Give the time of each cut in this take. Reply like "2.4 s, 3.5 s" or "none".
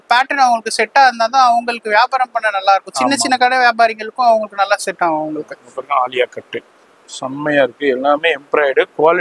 none